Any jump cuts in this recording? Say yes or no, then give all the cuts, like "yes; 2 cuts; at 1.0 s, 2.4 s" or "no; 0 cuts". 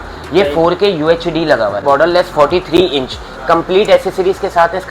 yes; 1 cut; at 1.8 s